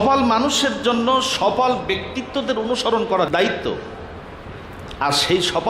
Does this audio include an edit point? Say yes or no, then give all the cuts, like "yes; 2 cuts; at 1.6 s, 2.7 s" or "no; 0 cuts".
yes; 1 cut; at 3.3 s